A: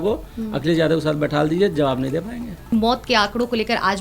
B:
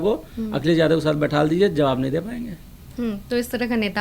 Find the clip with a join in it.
A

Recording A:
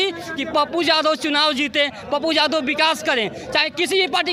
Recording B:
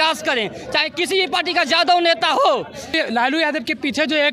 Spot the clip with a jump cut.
B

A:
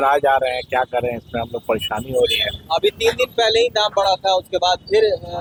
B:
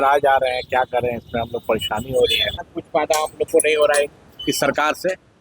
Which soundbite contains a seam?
B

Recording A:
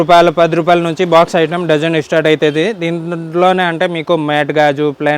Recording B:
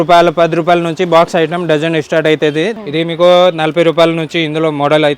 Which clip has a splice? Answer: B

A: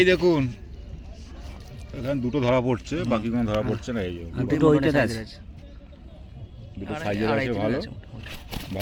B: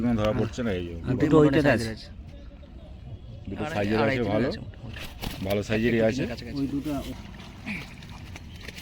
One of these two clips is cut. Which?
B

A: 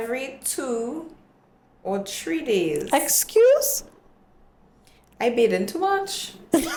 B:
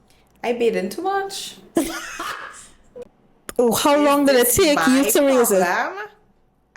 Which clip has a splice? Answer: B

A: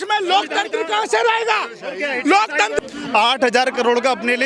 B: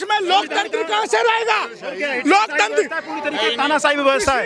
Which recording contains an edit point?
A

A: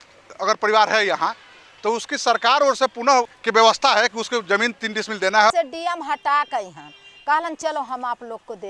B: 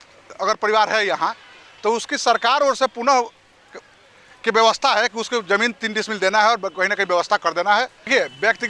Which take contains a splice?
A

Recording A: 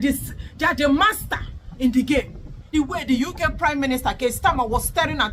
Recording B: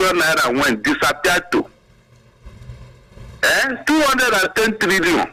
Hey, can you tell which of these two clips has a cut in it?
A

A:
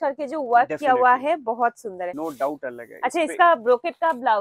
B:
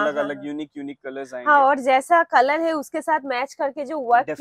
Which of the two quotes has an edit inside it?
A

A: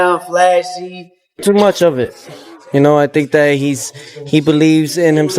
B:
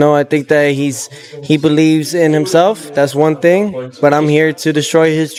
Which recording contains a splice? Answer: A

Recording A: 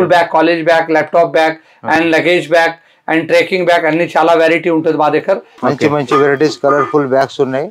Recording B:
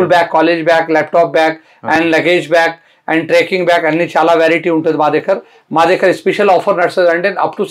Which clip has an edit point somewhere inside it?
A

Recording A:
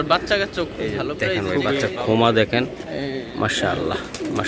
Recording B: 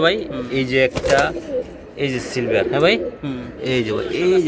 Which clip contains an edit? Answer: A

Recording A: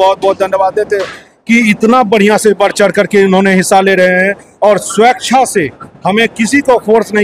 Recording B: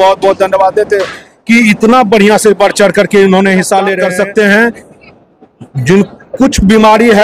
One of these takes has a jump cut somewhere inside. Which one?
B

